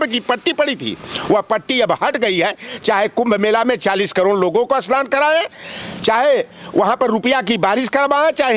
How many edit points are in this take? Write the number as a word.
zero